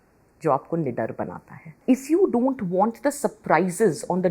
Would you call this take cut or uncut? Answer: cut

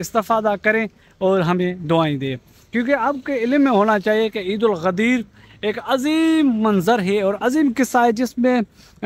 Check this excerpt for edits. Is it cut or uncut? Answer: uncut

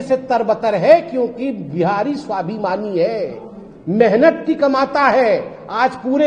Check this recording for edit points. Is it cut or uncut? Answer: uncut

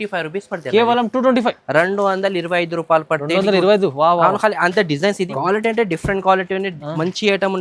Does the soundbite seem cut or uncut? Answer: cut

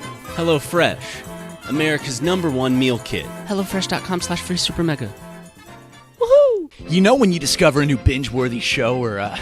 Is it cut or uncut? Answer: cut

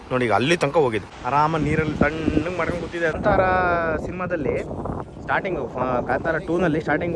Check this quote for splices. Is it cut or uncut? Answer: cut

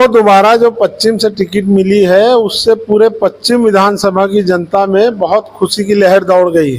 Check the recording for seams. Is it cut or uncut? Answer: uncut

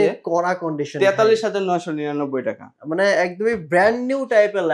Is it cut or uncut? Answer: uncut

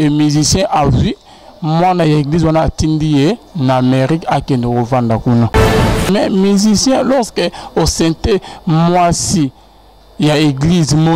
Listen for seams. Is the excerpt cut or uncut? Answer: cut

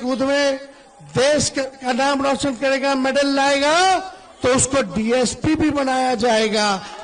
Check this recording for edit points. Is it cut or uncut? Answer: uncut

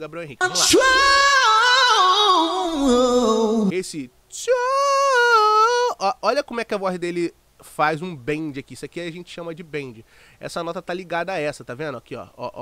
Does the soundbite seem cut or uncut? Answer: cut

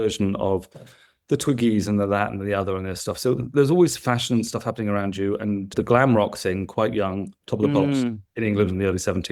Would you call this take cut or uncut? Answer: uncut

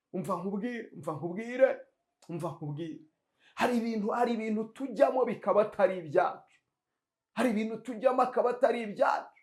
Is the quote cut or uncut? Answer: uncut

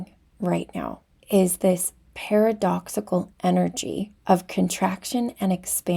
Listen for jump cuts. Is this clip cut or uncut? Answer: cut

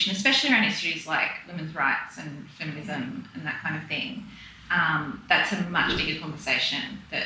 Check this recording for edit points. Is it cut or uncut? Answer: uncut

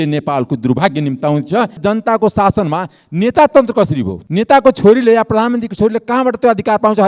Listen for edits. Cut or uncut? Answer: cut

